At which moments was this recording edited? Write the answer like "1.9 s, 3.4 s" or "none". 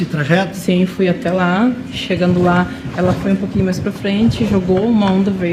none